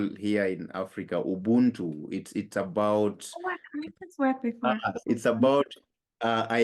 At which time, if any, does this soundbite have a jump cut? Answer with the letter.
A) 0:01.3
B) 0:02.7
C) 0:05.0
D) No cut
C